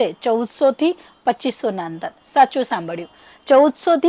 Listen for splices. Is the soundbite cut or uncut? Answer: uncut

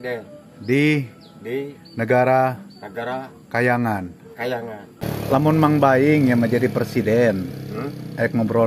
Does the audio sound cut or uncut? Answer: cut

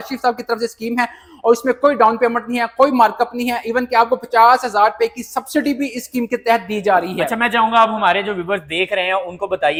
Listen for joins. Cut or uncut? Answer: uncut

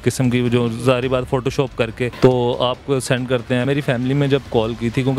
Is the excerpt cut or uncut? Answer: cut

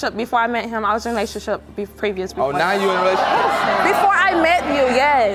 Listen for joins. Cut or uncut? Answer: uncut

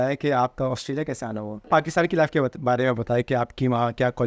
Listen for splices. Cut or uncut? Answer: cut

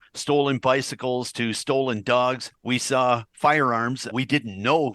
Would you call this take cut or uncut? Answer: cut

